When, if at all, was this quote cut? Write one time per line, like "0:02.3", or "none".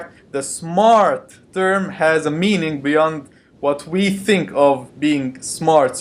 0:02.7

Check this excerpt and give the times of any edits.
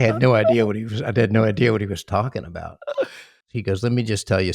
0:03.4

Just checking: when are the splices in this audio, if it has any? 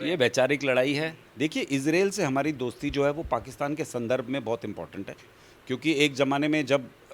0:01.2

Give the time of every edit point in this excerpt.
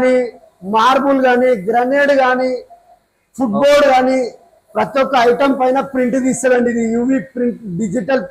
none

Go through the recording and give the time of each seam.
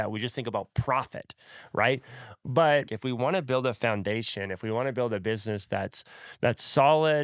0:02.9

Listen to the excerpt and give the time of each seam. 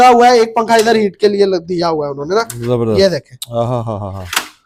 none

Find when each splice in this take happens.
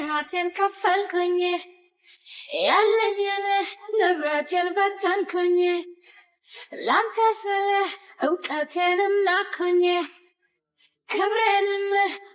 none

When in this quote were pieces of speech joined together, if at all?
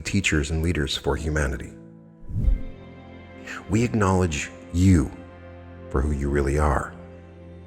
0:02.5

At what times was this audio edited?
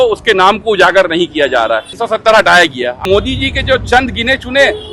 0:01.9
0:03.0

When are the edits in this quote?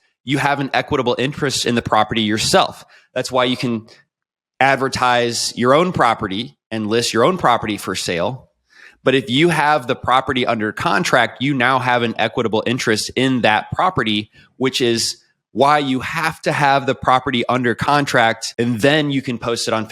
0:18.4

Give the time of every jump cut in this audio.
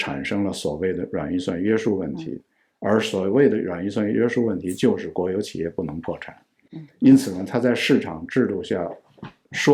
none

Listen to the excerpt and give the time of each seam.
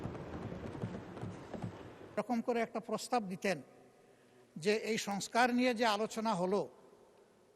0:02.2

